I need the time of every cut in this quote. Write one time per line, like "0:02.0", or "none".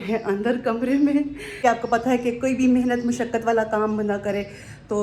0:01.5